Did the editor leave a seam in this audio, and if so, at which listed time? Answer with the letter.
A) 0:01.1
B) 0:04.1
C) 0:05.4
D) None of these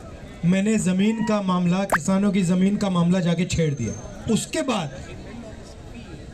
B